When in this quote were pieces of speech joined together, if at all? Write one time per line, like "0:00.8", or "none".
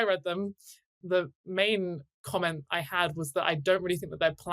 0:01.0
0:02.1